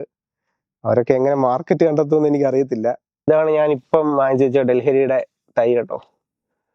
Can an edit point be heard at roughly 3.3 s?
yes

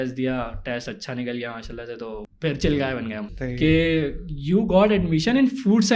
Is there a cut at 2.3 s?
yes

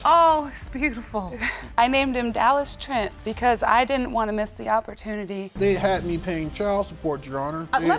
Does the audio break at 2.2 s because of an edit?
no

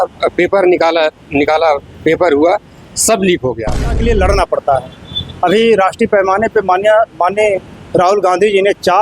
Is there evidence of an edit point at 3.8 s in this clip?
yes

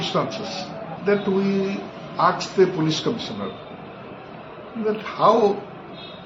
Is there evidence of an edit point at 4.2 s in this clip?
no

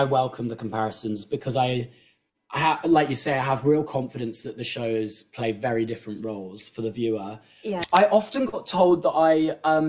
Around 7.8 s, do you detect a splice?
yes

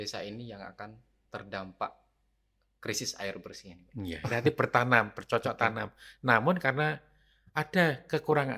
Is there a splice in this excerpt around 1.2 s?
no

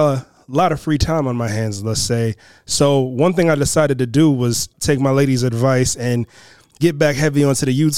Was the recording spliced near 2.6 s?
no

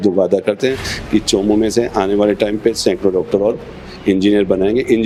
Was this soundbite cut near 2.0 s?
no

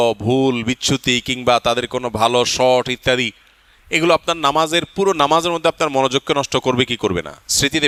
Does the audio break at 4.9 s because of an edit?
no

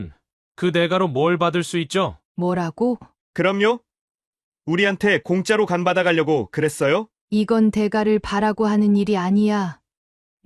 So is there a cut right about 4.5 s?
no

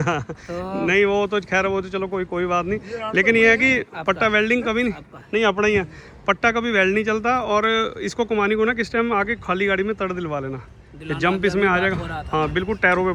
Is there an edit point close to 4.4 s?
no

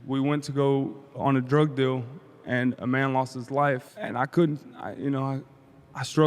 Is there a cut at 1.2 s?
yes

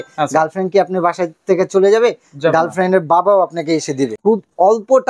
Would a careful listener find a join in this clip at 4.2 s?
yes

